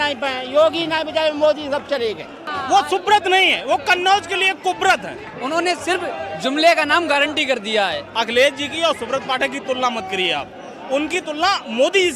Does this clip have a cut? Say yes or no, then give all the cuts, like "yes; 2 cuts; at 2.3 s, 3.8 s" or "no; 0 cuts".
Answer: yes; 3 cuts; at 2.4 s, 5.3 s, 8.0 s